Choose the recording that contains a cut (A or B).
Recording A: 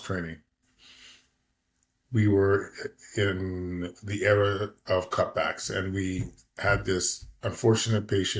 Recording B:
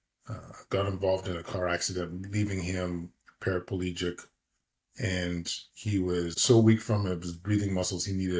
B